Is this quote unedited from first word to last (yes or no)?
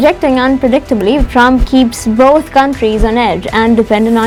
yes